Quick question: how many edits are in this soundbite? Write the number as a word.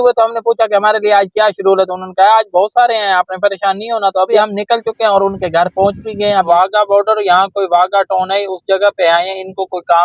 two